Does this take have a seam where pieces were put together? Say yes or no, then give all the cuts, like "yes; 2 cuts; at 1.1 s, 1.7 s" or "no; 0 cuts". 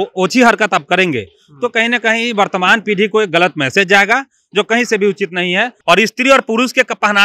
yes; 1 cut; at 5.7 s